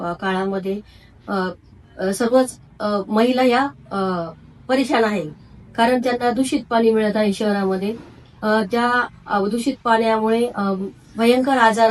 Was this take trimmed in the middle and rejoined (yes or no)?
no